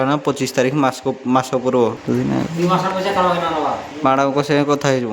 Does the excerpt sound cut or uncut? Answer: cut